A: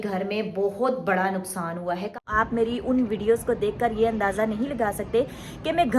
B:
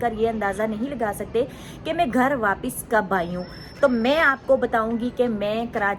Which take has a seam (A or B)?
A